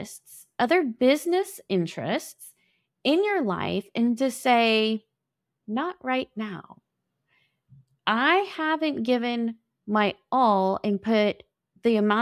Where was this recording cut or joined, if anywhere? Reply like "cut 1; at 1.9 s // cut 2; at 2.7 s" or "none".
none

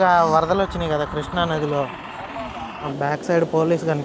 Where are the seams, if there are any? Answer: cut 1; at 2.9 s

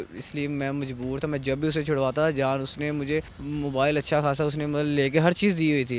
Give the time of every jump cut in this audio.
cut 1; at 3.4 s

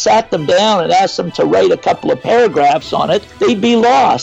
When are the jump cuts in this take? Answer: cut 1; at 3.3 s

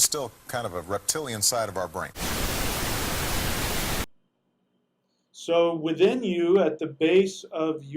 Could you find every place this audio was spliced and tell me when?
cut 1; at 2.2 s // cut 2; at 4.0 s

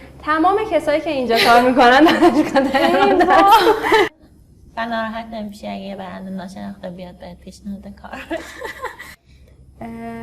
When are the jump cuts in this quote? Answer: cut 1; at 4.1 s // cut 2; at 9.2 s

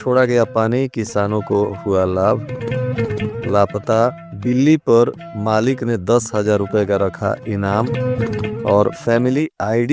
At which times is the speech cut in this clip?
none

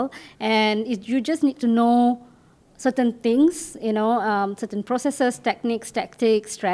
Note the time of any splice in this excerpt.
none

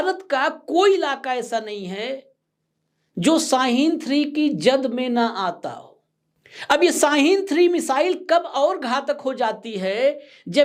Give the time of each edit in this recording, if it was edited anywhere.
none

